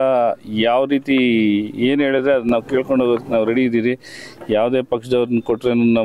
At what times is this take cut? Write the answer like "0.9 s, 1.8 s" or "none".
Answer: none